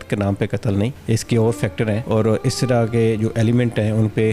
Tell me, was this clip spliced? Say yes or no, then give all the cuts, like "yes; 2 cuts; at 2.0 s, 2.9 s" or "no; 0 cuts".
yes; 2 cuts; at 1.0 s, 2.0 s